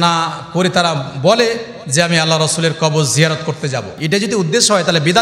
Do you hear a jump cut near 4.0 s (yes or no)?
yes